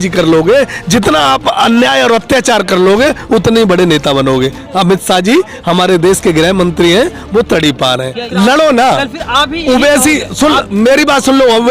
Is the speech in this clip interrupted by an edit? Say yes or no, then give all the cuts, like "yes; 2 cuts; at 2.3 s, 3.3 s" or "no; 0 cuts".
yes; 1 cut; at 8.2 s